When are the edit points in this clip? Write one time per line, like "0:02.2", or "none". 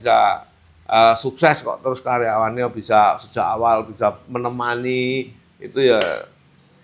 none